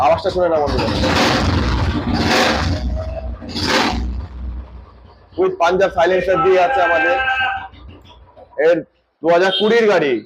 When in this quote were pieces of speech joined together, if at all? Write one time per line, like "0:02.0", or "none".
none